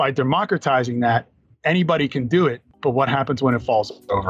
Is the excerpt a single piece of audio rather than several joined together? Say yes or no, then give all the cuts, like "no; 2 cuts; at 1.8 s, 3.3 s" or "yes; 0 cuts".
no; 1 cut; at 2.7 s